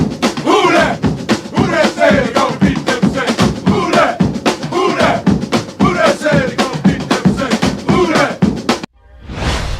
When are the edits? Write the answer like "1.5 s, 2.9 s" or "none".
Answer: 8.8 s